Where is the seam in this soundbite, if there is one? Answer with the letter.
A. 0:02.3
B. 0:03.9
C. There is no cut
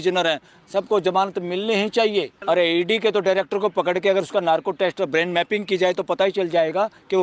A